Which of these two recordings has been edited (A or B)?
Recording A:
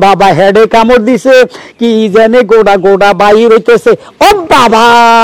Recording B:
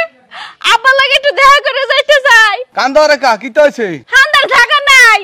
B